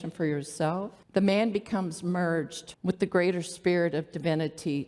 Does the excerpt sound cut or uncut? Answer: cut